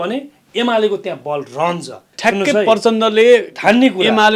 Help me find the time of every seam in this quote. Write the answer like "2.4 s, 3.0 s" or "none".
2.1 s

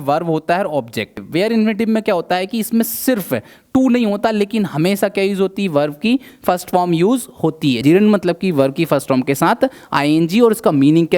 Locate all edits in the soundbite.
1.2 s, 7.8 s

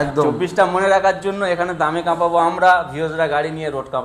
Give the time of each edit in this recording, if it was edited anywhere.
none

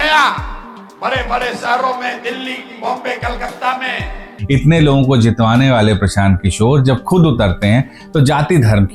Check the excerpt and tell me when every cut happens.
4.3 s

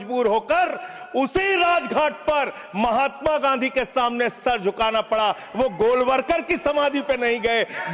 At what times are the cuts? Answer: none

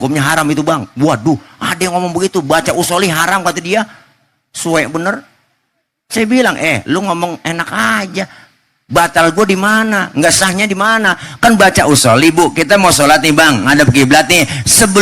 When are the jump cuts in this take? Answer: none

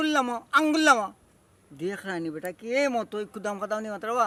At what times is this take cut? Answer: none

